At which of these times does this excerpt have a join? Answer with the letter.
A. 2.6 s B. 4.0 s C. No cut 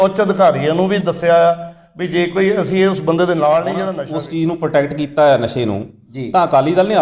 B